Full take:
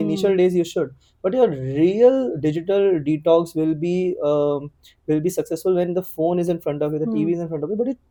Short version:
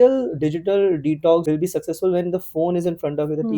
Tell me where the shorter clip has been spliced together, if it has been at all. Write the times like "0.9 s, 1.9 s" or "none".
1.4 s